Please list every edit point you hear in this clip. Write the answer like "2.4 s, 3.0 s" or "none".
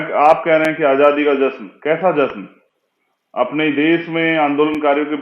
none